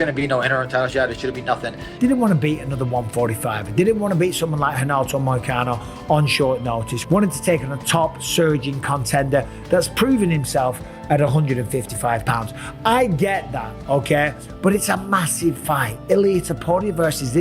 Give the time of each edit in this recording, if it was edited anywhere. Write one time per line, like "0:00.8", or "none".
0:01.8

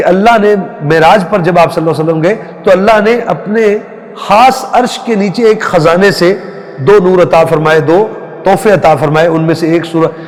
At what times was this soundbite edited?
none

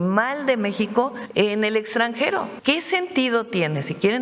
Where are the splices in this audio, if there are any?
0:01.2
0:02.5

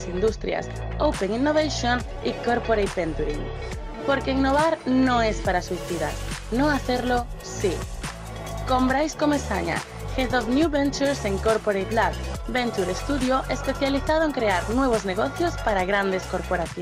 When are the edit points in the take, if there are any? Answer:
none

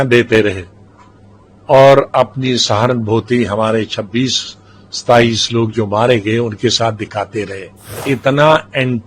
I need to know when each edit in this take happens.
0:08.0

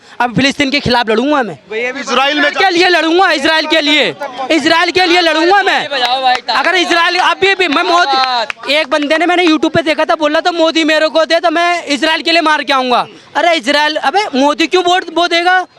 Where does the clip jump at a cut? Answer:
none

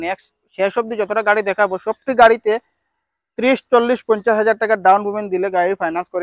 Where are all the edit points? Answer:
none

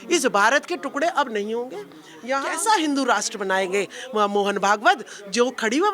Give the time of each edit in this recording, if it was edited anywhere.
0:02.4

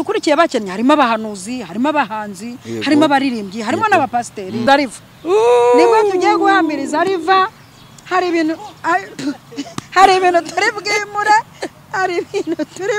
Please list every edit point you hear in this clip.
0:04.6

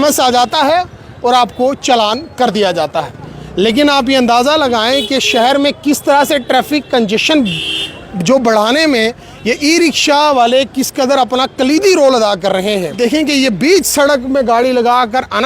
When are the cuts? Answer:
0:12.9

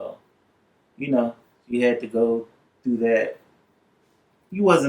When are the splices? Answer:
none

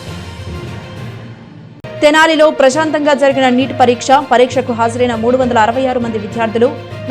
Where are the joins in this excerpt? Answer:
none

